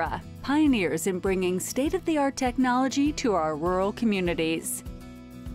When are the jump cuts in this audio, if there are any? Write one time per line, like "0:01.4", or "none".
0:04.6